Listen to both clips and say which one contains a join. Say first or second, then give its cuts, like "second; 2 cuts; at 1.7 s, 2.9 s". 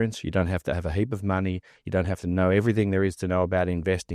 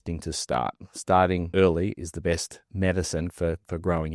second; 2 cuts; at 1.5 s, 2.7 s